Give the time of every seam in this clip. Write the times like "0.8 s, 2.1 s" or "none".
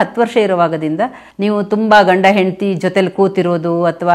1.2 s